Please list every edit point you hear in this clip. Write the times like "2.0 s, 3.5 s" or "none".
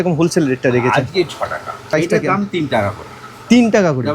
1.9 s

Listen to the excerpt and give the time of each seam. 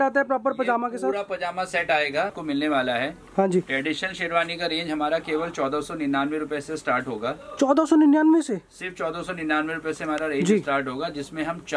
2.3 s

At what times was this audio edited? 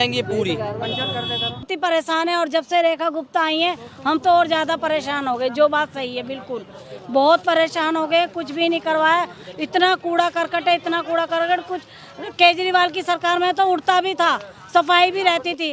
1.7 s

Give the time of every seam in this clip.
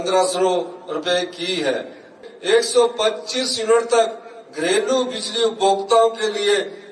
2.1 s

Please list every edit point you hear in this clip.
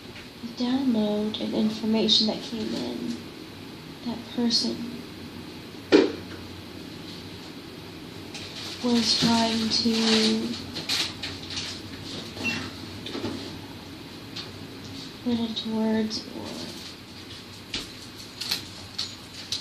none

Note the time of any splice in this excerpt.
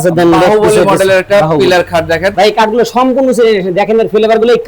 2.3 s

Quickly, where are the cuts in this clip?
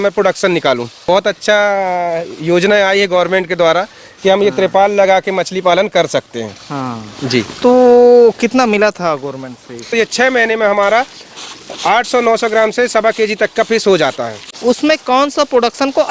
1.0 s, 9.9 s, 14.6 s

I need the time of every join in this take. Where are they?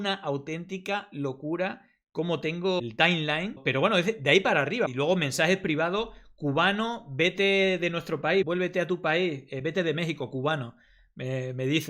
4.9 s, 8.5 s

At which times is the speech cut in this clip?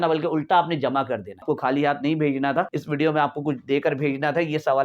1.4 s, 2.8 s

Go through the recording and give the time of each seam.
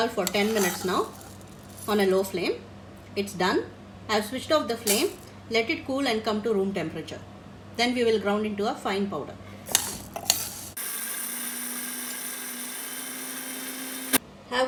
none

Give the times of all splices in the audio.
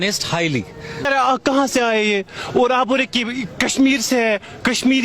1.1 s

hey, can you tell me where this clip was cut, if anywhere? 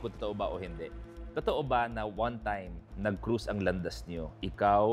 none

